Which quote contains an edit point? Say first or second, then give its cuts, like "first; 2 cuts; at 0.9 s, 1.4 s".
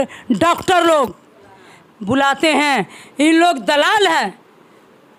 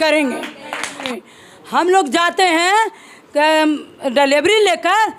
second; 1 cut; at 1.1 s